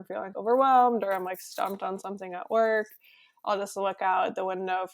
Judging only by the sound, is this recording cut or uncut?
uncut